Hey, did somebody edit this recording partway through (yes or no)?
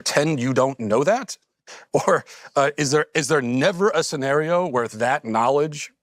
no